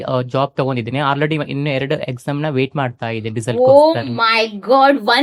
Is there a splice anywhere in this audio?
no; 0 cuts

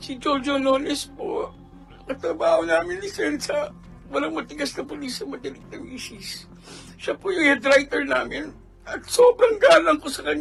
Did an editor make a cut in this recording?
no; 0 cuts

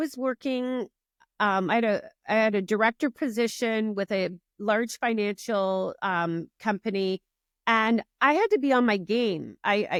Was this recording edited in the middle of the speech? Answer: no; 0 cuts

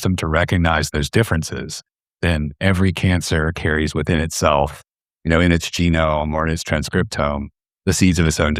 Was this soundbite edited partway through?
no; 0 cuts

